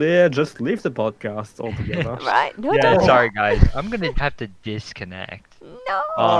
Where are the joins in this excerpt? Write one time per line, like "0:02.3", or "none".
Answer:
none

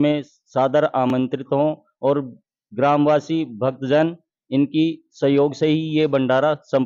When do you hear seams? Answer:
none

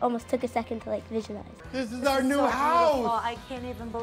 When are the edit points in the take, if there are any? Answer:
0:01.6

